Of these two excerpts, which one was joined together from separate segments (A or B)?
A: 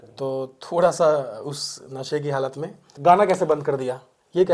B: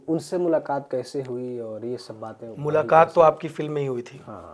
A